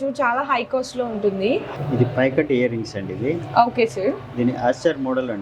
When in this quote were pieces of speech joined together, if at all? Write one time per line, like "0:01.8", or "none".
0:01.8